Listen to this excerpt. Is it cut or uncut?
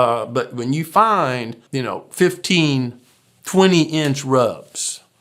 cut